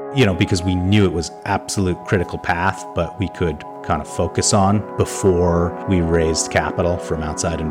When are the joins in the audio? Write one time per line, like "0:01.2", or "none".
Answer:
none